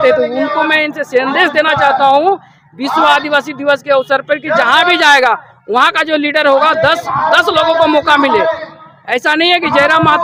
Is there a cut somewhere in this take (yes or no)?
no